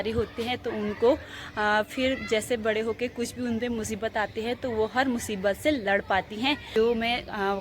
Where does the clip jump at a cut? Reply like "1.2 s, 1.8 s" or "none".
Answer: 6.7 s